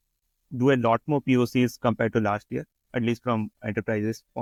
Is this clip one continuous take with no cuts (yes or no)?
yes